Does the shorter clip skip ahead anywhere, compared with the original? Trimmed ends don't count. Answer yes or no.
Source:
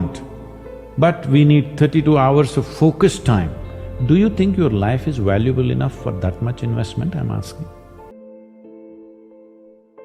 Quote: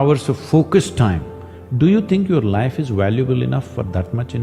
no